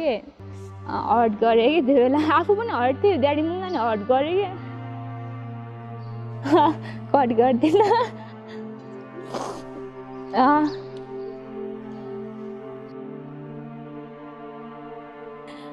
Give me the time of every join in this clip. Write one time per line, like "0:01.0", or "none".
none